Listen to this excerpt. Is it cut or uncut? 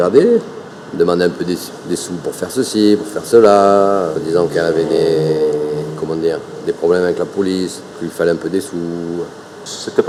uncut